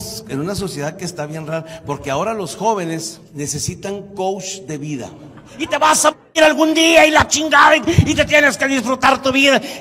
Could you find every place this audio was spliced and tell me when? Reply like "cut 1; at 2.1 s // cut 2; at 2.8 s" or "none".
cut 1; at 3.2 s // cut 2; at 5.7 s